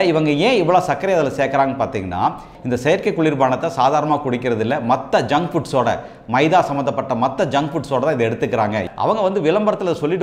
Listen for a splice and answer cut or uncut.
cut